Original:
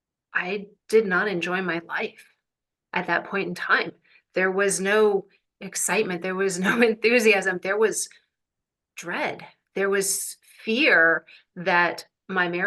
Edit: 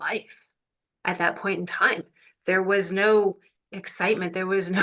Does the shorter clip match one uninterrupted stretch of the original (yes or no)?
yes